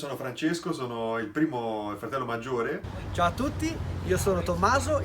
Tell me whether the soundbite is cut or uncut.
cut